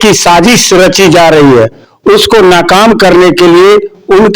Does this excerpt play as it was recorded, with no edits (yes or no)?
yes